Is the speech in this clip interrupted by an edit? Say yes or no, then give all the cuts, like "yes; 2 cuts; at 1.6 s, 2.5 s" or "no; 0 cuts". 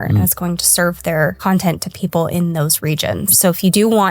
yes; 2 cuts; at 1.4 s, 3.3 s